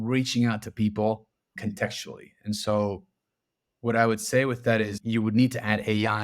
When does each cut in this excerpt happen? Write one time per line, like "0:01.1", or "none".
0:01.5
0:05.0